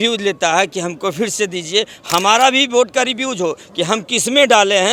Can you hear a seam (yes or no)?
no